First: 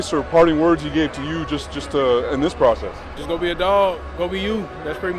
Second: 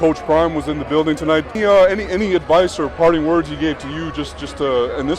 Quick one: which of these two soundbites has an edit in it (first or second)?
second